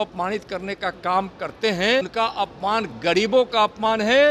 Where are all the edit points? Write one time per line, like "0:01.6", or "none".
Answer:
0:02.1